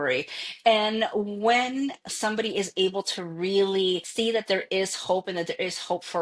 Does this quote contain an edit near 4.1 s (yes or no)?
yes